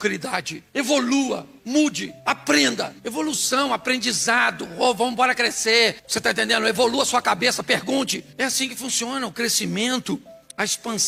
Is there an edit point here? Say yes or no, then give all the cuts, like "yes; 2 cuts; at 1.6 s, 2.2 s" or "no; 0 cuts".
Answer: no; 0 cuts